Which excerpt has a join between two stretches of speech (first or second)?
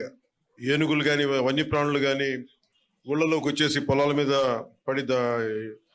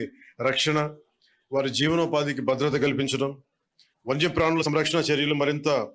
second